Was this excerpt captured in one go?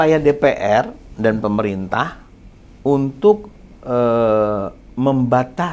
yes; 0 cuts

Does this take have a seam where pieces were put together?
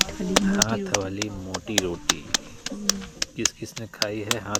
no; 0 cuts

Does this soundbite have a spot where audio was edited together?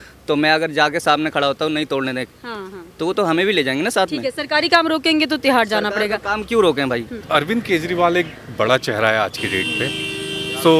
yes; 1 cut; at 7.2 s

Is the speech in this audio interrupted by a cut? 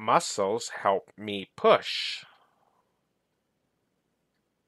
no; 0 cuts

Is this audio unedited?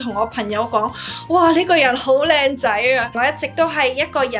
no; 1 cut; at 3.1 s

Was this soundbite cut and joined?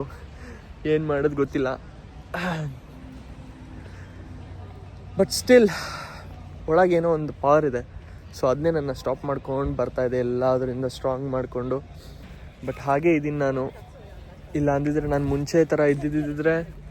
no; 0 cuts

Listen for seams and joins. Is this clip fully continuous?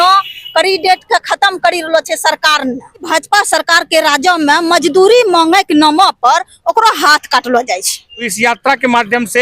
no; 2 cuts; at 3.1 s, 8.3 s

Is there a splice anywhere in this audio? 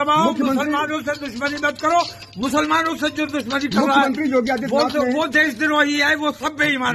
no; 0 cuts

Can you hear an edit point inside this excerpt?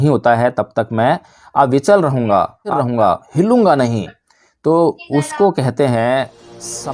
yes; 1 cut; at 2.7 s

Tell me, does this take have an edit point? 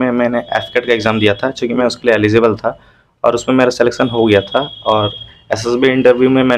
no; 0 cuts

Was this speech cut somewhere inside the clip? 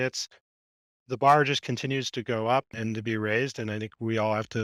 no; 0 cuts

